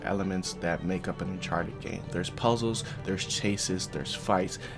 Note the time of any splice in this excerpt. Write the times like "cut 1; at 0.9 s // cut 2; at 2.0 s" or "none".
none